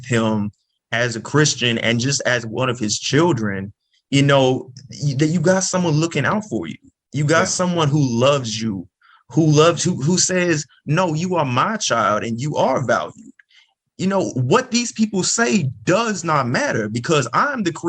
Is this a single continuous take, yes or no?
yes